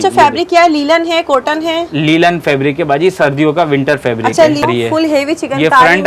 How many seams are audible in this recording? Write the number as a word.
one